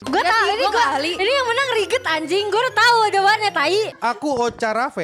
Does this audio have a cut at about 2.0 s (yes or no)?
no